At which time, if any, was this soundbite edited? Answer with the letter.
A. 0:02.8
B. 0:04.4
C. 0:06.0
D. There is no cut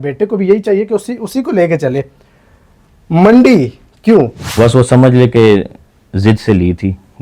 B